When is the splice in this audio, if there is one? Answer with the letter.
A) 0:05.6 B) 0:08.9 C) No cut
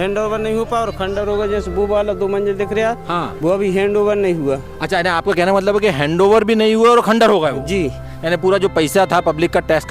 C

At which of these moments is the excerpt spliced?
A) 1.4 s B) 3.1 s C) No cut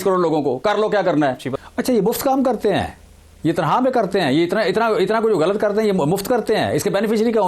A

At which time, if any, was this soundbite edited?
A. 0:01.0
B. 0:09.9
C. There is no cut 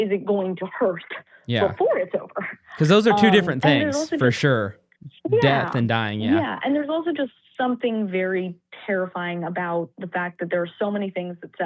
C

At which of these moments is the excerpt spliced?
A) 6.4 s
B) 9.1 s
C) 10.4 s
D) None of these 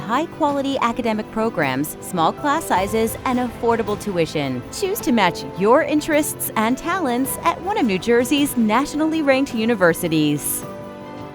C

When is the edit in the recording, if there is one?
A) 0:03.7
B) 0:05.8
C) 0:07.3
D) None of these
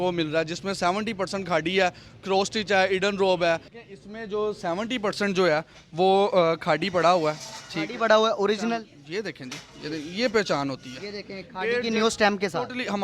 A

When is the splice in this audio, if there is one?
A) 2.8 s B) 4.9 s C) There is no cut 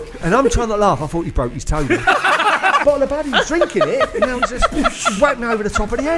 A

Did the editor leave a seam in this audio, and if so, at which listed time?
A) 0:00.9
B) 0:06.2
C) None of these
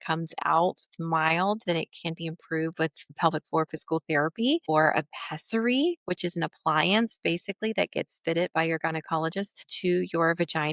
A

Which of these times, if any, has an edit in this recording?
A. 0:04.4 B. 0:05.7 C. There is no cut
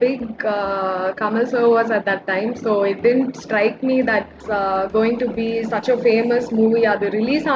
A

